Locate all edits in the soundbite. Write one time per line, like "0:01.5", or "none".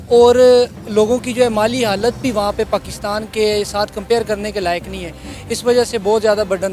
none